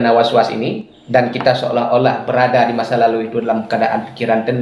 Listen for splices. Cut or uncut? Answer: cut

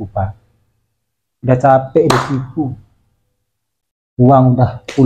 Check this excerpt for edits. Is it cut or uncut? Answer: uncut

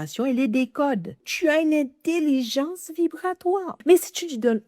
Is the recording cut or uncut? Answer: cut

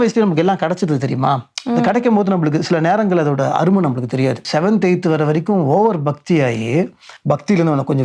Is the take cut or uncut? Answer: cut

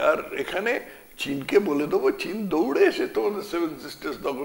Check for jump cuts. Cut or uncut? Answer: uncut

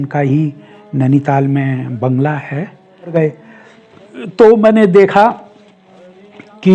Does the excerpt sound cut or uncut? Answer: cut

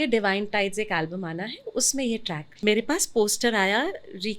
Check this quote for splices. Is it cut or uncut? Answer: cut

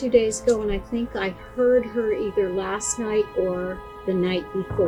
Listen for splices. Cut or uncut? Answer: uncut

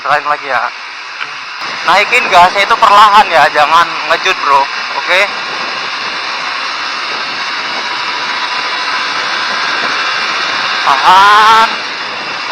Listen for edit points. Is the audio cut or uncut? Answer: cut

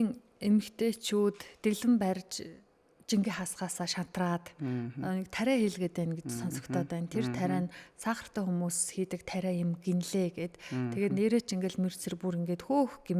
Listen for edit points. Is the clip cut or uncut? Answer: uncut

